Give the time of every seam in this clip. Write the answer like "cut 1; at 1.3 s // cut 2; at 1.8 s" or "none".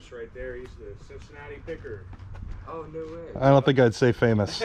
none